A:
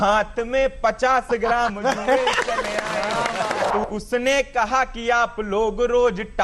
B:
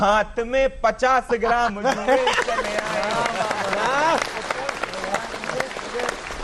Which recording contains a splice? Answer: A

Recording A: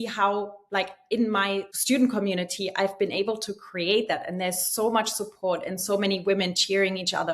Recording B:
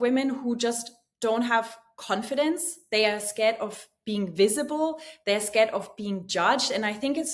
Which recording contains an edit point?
A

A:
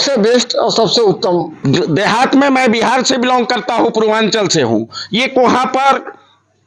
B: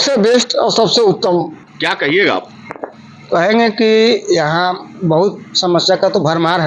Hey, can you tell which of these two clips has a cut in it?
A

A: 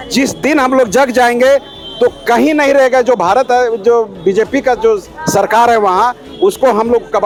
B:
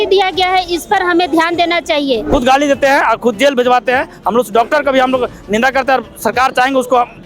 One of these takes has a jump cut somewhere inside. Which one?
B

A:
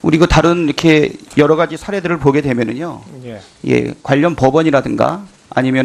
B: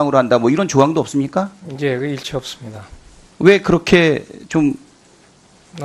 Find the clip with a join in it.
B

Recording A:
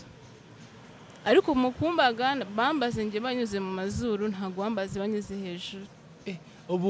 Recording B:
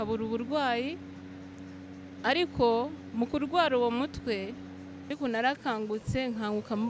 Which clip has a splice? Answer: B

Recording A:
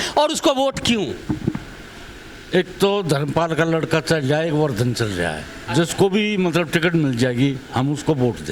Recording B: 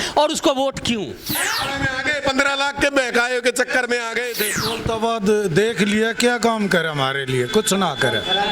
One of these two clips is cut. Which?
B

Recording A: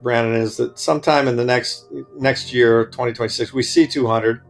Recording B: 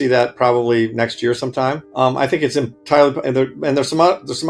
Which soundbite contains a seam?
B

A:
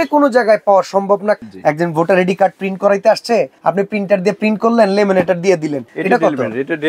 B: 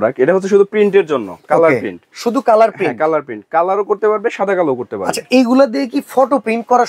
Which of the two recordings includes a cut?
A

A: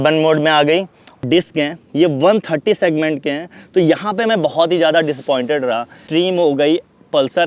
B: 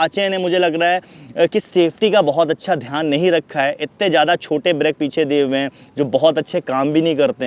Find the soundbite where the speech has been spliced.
A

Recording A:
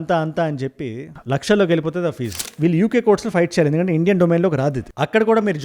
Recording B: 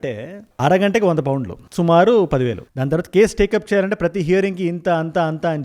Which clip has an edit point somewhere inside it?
A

